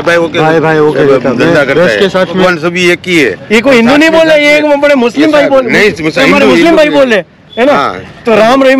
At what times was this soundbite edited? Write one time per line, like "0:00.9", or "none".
0:02.4

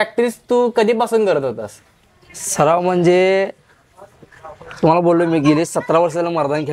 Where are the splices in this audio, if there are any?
none

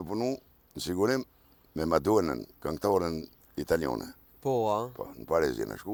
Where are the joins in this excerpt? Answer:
none

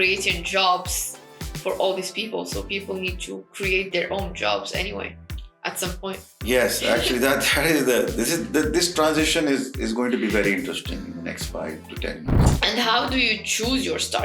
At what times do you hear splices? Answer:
0:12.3

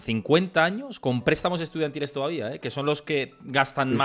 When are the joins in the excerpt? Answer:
none

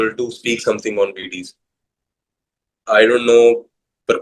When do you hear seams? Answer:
none

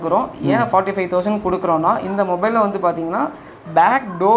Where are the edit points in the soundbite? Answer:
none

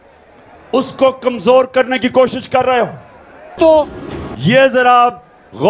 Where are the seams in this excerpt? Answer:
0:03.5

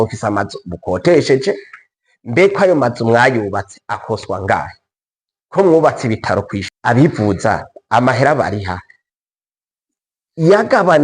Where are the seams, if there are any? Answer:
0:06.6

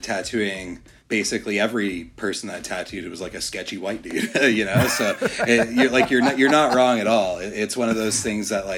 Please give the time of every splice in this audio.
0:00.9

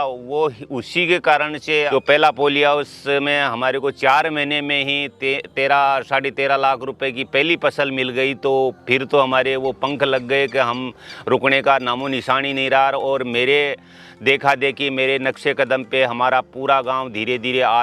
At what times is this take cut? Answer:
0:01.9

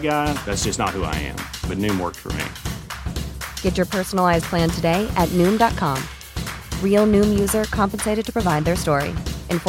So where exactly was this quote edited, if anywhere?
none

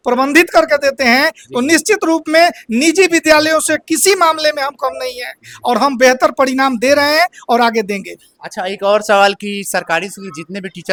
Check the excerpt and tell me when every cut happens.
none

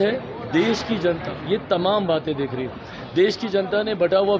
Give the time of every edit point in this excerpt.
none

